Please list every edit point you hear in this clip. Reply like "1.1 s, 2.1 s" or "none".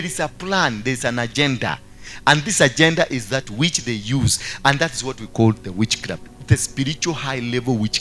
none